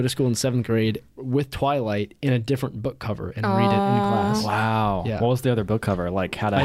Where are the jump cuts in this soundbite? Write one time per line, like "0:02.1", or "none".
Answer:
0:01.1